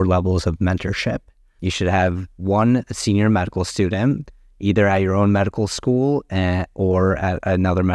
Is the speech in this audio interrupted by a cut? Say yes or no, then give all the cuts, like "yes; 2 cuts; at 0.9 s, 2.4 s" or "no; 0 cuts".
no; 0 cuts